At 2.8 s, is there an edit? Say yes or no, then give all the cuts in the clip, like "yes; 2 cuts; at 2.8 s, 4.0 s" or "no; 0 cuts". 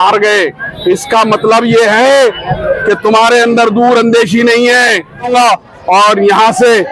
no; 1 cut; at 5.3 s